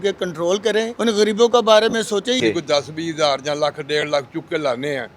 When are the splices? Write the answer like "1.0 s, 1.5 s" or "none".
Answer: 0.9 s, 2.4 s